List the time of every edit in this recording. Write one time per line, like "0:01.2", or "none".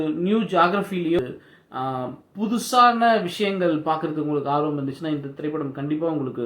0:01.2